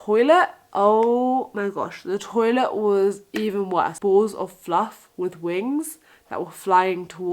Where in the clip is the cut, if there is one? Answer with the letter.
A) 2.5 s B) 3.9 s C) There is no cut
B